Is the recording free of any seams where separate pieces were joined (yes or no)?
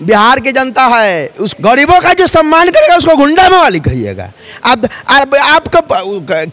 no